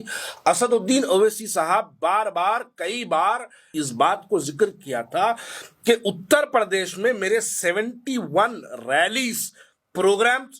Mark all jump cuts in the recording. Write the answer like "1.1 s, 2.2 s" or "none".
3.7 s